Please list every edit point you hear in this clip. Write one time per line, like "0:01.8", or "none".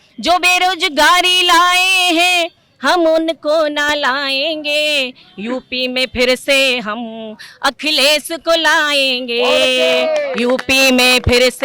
none